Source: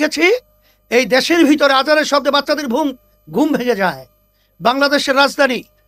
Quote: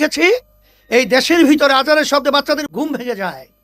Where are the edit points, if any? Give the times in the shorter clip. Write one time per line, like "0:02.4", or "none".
0:02.6